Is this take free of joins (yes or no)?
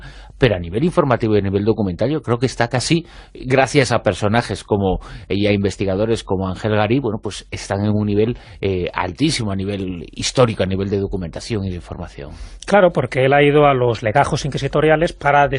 yes